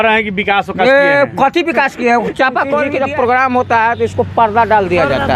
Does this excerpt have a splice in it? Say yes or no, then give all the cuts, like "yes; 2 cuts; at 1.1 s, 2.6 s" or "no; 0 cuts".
yes; 1 cut; at 2.9 s